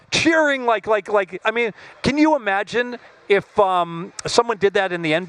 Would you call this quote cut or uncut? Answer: uncut